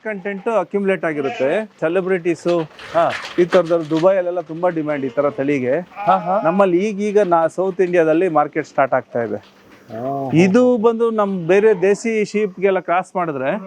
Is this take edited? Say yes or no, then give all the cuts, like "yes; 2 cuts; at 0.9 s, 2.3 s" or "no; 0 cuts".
yes; 1 cut; at 1.8 s